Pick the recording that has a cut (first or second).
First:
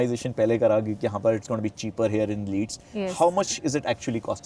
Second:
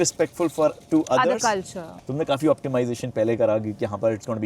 second